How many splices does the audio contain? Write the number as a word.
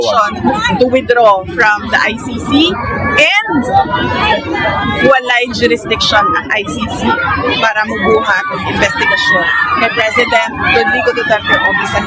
zero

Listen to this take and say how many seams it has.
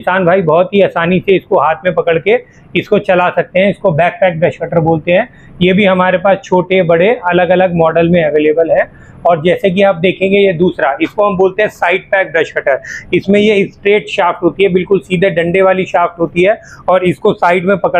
zero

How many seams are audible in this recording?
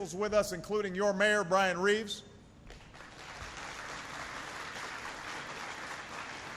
one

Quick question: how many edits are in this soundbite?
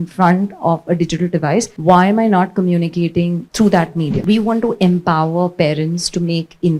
three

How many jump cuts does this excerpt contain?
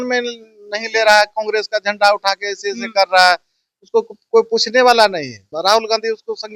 one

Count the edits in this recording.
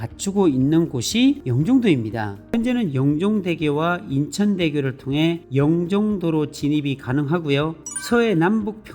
one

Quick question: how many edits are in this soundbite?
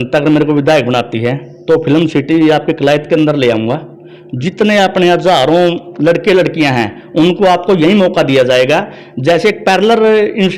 zero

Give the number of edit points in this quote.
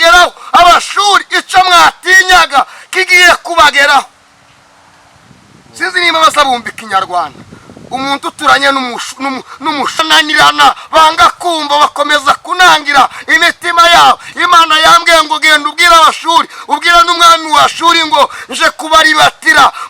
one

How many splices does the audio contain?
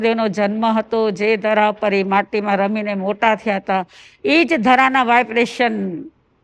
zero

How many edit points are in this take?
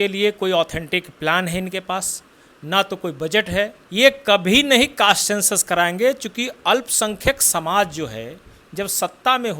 one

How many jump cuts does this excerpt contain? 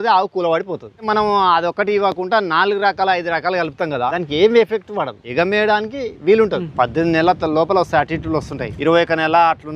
five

